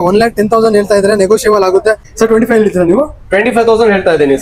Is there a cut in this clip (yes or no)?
yes